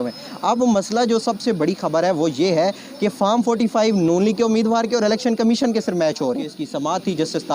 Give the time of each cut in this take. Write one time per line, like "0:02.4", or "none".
0:06.6